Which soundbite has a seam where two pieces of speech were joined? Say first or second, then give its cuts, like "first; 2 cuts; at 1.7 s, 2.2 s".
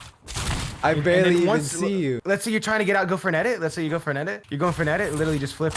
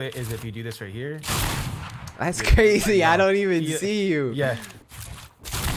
first; 2 cuts; at 2.2 s, 4.4 s